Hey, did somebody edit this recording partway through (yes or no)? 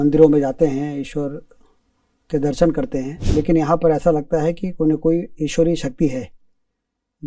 yes